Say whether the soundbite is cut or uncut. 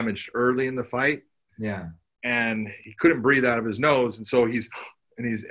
cut